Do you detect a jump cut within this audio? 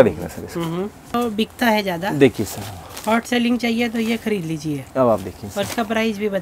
yes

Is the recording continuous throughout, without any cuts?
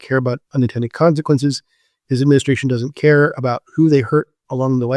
yes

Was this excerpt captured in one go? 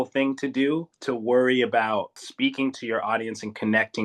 no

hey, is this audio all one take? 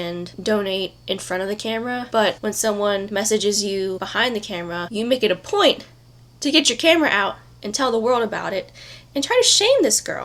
yes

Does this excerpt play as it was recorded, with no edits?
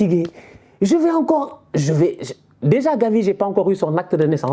yes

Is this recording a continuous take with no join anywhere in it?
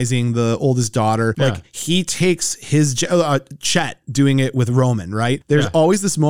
yes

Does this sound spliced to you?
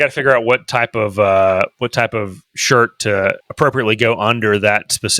yes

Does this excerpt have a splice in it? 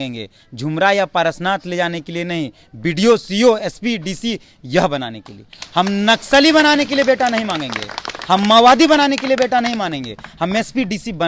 no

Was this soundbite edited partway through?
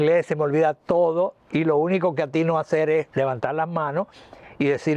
no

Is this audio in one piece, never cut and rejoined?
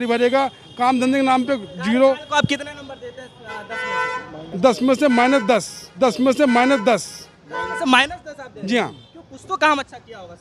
yes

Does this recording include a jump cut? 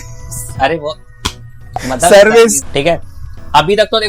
yes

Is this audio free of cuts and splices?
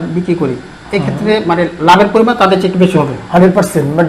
yes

